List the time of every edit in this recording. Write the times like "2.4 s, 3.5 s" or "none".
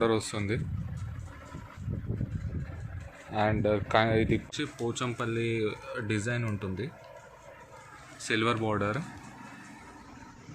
4.4 s